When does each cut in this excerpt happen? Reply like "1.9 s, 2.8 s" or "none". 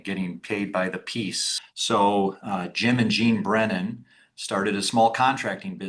1.4 s